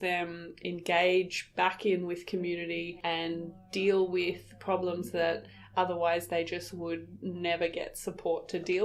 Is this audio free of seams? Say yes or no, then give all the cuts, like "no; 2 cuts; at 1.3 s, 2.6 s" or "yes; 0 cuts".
yes; 0 cuts